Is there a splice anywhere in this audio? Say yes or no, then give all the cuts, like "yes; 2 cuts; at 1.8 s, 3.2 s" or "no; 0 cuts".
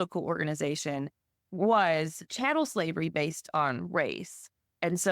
yes; 1 cut; at 2.2 s